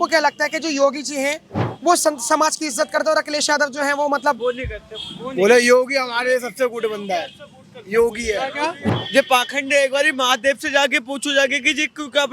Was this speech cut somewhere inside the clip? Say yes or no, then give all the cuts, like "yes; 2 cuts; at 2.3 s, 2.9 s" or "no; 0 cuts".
yes; 1 cut; at 8.8 s